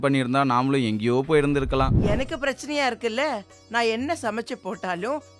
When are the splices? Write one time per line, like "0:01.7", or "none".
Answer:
0:02.0